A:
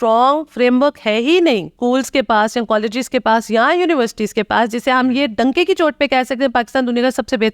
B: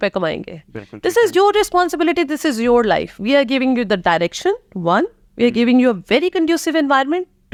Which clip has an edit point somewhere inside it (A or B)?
A